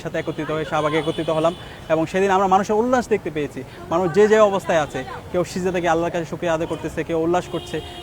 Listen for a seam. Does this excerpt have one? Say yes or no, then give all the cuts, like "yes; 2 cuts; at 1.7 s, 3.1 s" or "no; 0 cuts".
no; 0 cuts